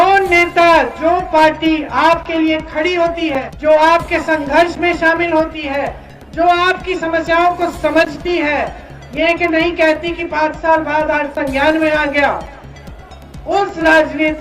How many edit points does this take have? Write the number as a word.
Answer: one